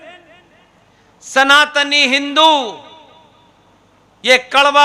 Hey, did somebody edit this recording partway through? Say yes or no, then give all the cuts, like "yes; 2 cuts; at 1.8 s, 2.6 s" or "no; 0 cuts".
no; 0 cuts